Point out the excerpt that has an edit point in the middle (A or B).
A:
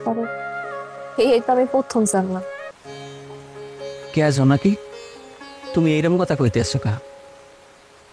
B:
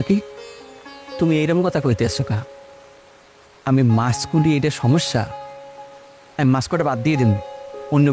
A